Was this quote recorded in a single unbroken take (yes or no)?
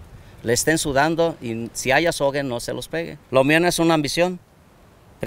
no